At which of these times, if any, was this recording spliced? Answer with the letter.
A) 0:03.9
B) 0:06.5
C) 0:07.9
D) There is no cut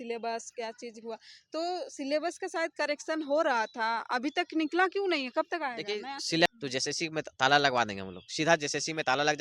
B